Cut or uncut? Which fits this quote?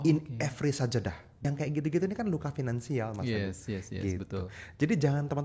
cut